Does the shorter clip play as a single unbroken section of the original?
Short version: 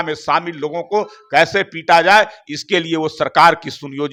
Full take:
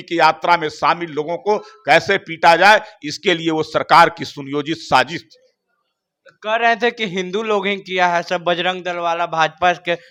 yes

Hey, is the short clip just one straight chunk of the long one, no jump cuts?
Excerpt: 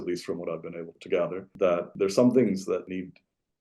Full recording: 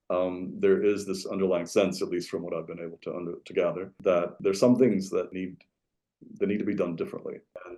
no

